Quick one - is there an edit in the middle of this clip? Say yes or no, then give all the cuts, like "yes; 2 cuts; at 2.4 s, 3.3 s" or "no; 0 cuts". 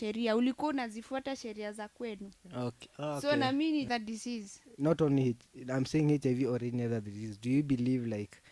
yes; 1 cut; at 3.9 s